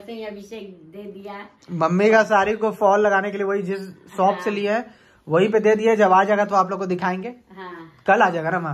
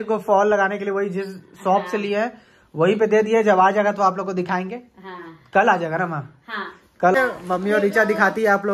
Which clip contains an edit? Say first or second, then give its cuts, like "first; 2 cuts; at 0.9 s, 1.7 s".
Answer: second; 1 cut; at 7.2 s